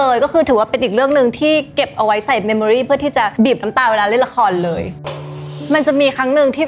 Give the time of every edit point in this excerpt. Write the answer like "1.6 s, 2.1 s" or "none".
3.3 s, 5.5 s